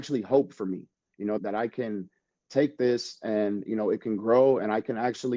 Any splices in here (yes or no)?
yes